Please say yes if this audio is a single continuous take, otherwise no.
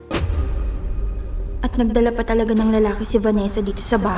yes